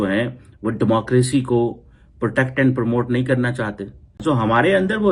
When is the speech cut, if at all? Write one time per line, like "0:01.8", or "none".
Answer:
0:04.2